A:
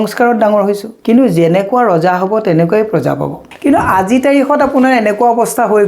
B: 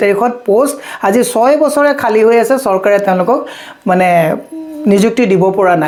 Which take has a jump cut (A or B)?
A